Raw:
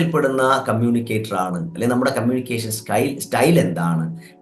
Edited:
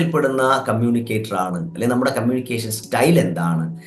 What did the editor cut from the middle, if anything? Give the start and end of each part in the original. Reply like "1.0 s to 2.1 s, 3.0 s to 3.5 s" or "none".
2.8 s to 3.2 s